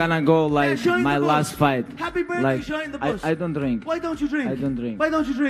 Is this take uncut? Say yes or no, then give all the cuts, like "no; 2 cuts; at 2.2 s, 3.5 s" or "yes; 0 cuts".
yes; 0 cuts